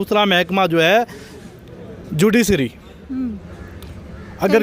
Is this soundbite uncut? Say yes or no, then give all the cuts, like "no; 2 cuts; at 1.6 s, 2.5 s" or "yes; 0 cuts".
yes; 0 cuts